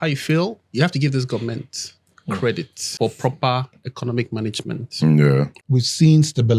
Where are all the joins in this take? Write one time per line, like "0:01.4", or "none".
0:02.9
0:05.6